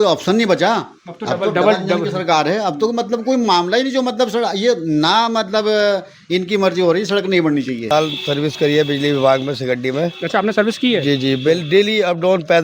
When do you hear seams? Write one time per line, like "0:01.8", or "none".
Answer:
0:07.9